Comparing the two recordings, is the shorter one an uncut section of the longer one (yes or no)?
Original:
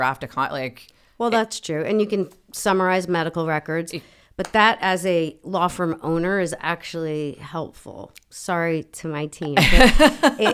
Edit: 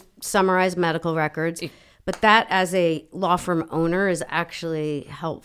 yes